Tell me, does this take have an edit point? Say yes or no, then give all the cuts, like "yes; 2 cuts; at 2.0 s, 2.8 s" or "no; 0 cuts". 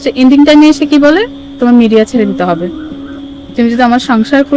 yes; 1 cut; at 3.1 s